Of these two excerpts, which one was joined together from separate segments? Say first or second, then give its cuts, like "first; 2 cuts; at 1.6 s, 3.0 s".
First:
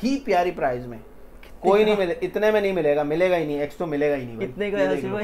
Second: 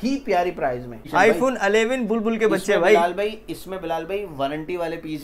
second; 1 cut; at 1.0 s